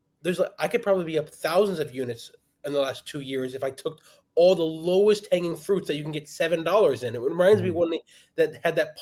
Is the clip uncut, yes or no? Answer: yes